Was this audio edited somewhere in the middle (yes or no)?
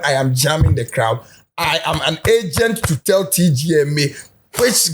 no